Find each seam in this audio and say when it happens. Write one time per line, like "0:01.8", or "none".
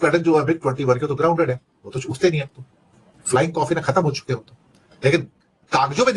none